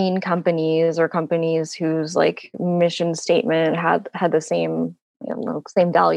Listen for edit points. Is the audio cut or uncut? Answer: uncut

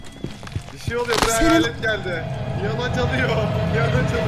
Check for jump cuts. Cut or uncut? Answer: uncut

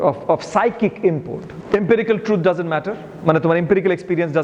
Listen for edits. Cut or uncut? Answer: cut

